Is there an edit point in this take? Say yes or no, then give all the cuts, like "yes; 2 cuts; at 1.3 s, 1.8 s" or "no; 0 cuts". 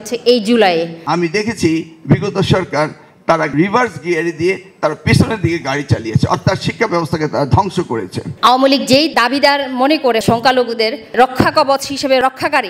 yes; 3 cuts; at 1.0 s, 3.5 s, 8.4 s